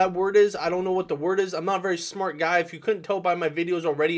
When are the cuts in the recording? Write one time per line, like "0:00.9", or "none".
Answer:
none